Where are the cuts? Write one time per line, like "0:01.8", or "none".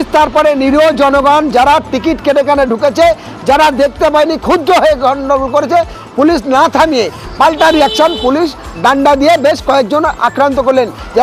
none